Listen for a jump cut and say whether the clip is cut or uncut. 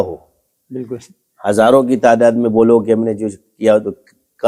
uncut